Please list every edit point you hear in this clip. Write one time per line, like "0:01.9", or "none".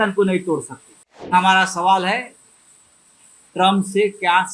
0:01.3

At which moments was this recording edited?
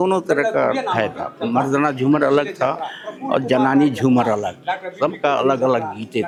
none

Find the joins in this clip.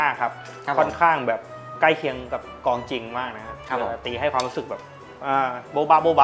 none

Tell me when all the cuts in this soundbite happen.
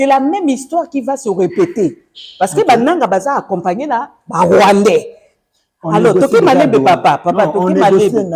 none

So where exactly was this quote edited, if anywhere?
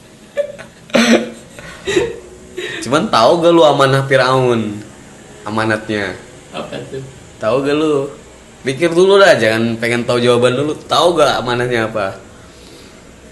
none

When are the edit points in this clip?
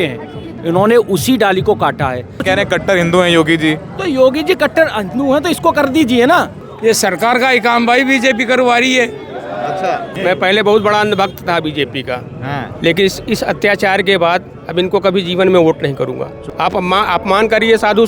0:02.4
0:06.6
0:10.1
0:16.3

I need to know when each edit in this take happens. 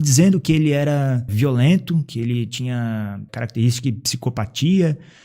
0:01.3
0:03.3

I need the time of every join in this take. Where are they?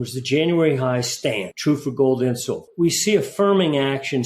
0:01.5
0:02.6

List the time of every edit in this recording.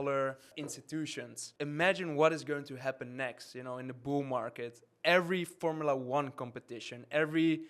0:01.0

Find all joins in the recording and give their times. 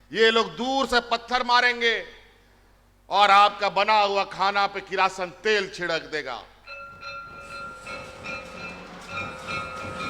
none

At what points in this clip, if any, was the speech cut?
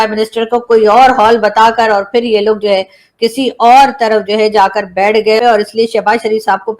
0:05.4

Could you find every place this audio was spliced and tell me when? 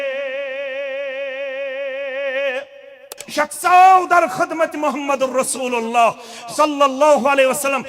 0:03.2

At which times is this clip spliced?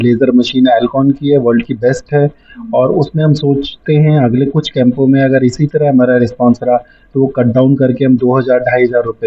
none

